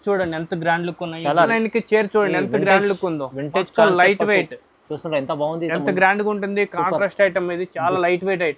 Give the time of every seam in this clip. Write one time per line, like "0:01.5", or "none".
0:01.5